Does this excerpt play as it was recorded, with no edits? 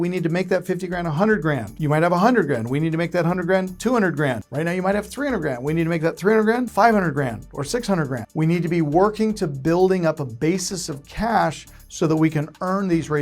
no; 4 cuts; at 1.7 s, 4.5 s, 6.7 s, 8.2 s

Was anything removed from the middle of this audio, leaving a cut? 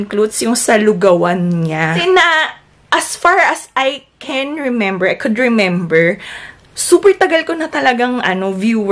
yes; 1 cut; at 2.0 s

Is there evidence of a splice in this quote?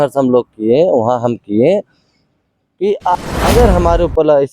yes; 1 cut; at 3.2 s

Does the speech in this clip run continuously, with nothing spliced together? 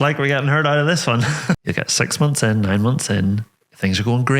no; 1 cut; at 1.6 s

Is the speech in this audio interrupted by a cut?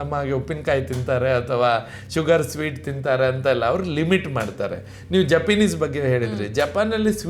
no; 0 cuts

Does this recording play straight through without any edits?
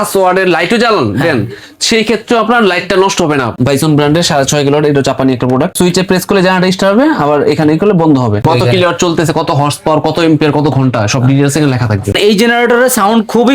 no; 4 cuts; at 3.5 s, 5.8 s, 8.4 s, 12.1 s

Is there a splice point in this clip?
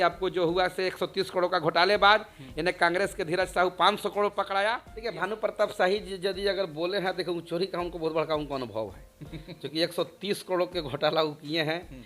yes; 1 cut; at 4.9 s

